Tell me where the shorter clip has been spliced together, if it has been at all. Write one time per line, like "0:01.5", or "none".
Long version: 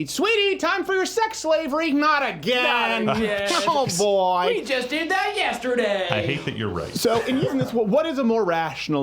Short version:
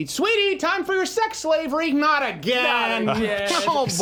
none